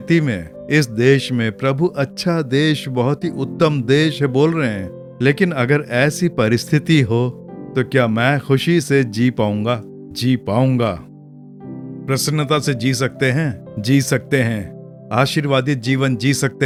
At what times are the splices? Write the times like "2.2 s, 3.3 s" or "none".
none